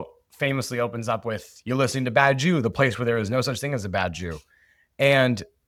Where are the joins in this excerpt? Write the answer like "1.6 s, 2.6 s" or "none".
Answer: none